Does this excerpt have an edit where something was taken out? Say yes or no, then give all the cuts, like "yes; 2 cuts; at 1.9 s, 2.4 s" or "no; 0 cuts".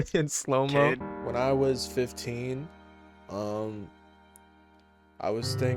yes; 1 cut; at 1.1 s